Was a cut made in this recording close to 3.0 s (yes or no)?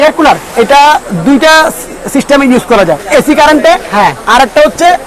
yes